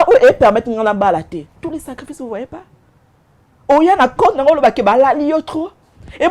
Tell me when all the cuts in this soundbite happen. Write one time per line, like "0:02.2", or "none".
none